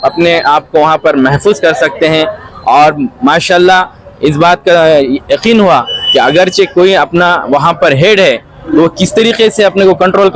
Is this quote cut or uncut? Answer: uncut